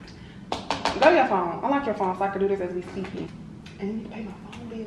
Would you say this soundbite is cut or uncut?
cut